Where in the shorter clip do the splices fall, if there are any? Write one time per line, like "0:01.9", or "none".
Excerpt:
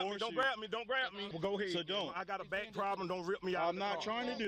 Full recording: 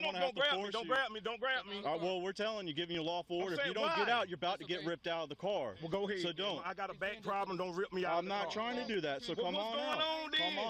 0:01.3